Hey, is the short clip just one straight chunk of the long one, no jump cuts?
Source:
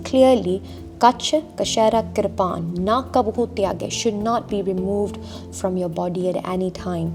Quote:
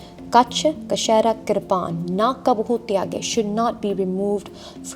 yes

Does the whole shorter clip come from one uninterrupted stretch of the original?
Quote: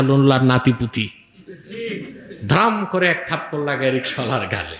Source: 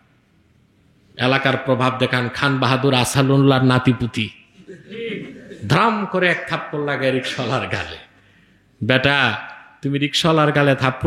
yes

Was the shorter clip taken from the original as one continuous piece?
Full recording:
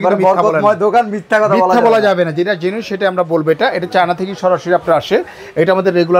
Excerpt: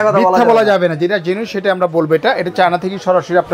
yes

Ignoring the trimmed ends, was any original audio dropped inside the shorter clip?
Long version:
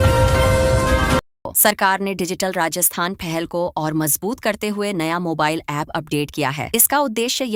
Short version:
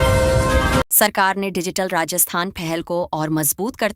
yes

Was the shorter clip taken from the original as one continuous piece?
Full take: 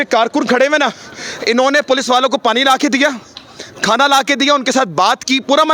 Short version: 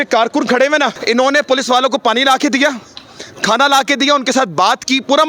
no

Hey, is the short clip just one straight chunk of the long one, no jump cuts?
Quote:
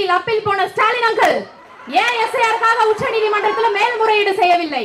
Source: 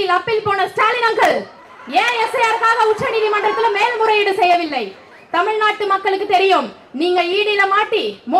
yes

